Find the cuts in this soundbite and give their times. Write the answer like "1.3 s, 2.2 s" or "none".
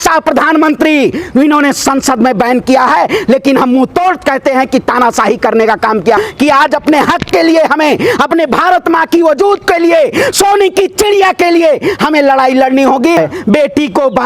6.2 s, 13.2 s